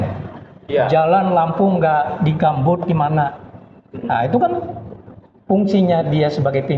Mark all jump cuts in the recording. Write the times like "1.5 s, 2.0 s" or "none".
none